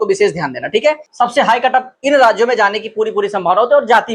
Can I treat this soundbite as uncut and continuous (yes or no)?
no